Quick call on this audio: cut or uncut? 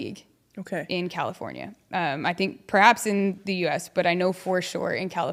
uncut